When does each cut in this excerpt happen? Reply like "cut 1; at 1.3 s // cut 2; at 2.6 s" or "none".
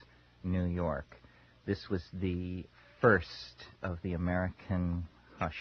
cut 1; at 1.2 s